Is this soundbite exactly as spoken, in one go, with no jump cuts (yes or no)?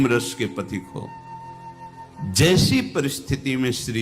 no